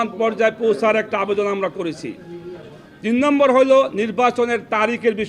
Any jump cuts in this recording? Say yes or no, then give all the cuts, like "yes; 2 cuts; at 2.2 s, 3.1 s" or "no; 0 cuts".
no; 0 cuts